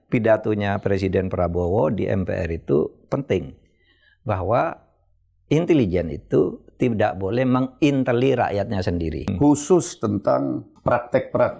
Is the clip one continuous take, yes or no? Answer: no